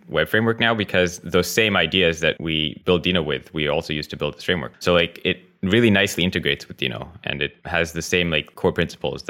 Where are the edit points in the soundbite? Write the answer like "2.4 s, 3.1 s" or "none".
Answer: 2.6 s, 4.7 s, 7.6 s, 8.5 s